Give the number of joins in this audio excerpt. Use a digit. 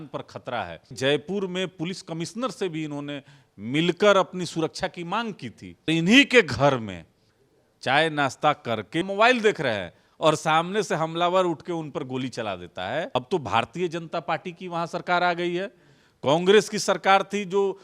4